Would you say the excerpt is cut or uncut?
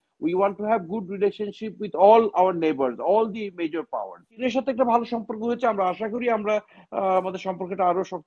cut